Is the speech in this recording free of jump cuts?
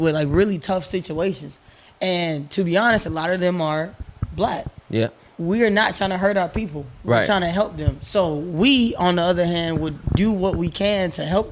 yes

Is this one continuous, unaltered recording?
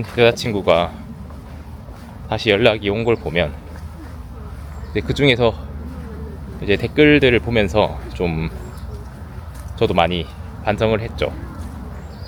yes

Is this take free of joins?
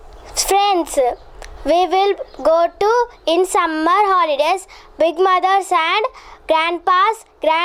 yes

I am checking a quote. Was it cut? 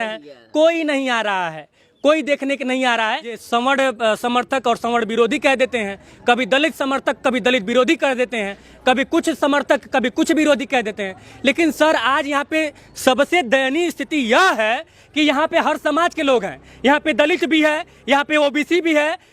yes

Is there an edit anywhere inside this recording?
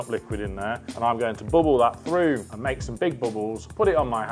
yes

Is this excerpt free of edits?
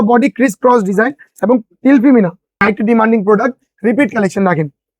no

